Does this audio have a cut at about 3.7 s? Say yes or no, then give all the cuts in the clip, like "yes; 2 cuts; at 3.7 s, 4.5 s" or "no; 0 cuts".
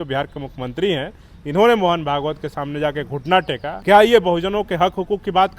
yes; 1 cut; at 3.7 s